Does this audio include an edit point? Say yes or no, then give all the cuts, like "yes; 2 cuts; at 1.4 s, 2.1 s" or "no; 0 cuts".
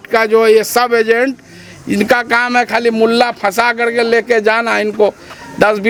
no; 0 cuts